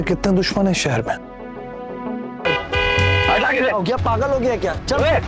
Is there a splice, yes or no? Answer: yes